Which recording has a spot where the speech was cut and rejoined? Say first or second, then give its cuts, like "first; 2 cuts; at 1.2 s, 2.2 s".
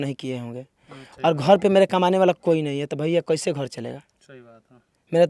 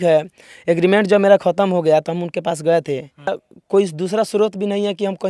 second; 1 cut; at 3.3 s